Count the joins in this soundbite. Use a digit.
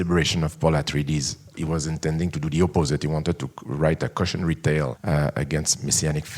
2